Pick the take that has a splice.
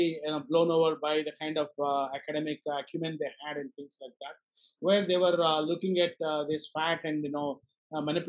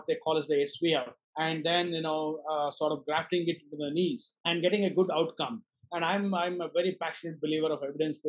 second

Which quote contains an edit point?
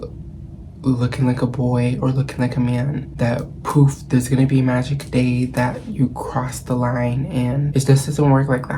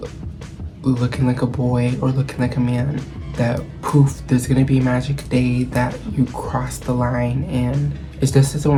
first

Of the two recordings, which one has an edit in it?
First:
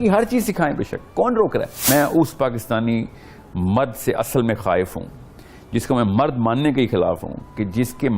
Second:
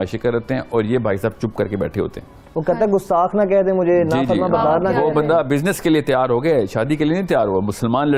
first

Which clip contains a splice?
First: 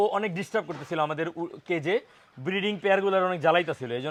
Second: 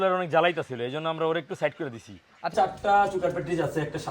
second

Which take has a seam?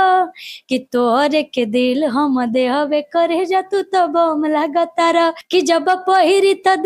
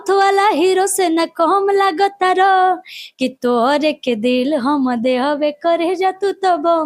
first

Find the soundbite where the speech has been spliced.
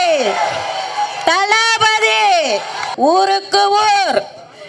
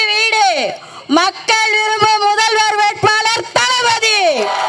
first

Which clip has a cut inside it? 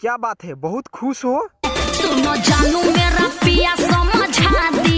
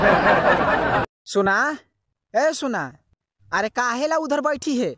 second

